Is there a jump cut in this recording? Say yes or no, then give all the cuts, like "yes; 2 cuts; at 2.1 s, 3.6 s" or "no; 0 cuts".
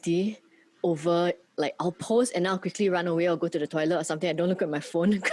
no; 0 cuts